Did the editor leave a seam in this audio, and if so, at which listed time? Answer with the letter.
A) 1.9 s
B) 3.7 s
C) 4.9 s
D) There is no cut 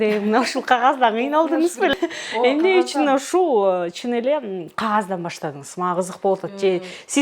A